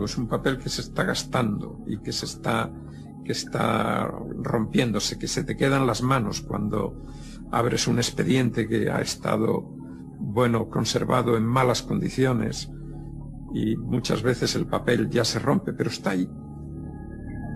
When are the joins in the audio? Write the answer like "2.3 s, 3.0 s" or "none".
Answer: 9.1 s